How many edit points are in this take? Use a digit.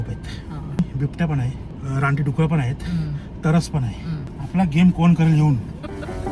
3